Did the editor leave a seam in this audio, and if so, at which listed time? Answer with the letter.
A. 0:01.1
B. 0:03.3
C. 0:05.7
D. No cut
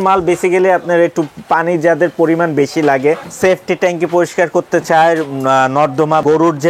B